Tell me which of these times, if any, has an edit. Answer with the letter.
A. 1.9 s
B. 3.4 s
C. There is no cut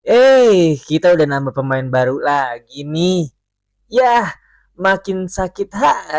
C